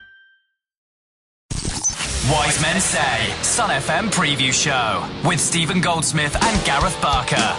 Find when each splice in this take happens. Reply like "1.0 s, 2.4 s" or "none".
1.0 s